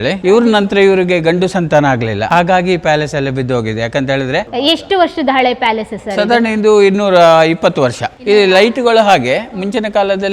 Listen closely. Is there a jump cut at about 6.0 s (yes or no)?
no